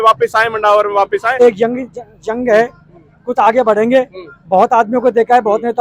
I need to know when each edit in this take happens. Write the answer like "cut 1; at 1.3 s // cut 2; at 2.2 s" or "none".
cut 1; at 1.4 s